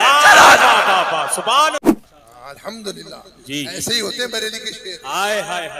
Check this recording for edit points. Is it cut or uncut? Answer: cut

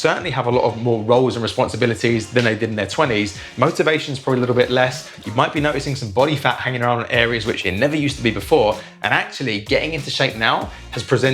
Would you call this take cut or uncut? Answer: cut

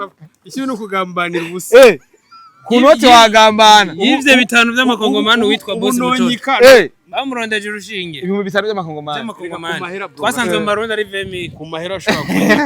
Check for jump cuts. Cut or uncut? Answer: uncut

